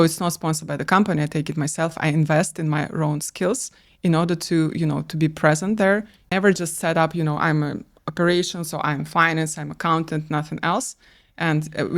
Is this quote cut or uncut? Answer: cut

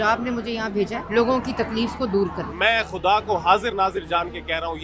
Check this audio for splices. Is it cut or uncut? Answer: cut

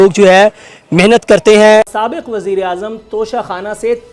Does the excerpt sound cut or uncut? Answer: cut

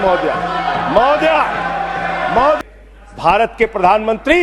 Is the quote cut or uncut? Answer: cut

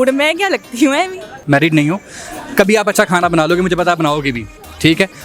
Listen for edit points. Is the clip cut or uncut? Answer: uncut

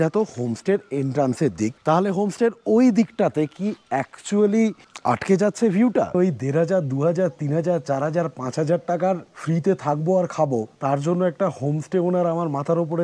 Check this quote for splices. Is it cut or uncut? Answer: cut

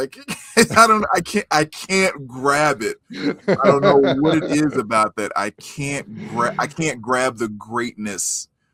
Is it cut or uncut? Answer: uncut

